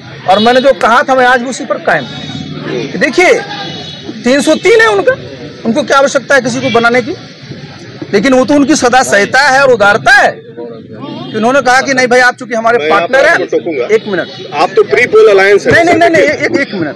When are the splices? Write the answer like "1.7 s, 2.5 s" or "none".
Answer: none